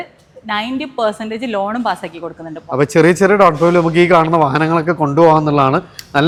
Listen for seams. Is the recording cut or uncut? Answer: uncut